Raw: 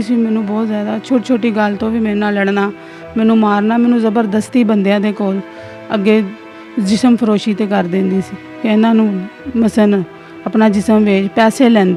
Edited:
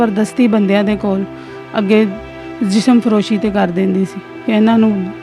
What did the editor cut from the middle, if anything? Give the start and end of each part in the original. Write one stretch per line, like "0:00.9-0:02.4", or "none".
none